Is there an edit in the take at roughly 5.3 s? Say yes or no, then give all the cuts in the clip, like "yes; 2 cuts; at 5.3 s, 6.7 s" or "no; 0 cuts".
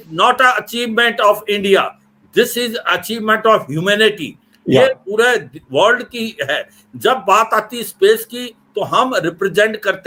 no; 0 cuts